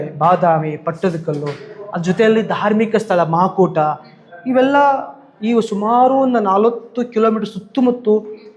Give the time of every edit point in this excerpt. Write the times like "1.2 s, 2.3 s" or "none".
none